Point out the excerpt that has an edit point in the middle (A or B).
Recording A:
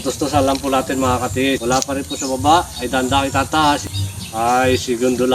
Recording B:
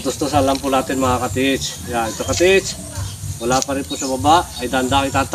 A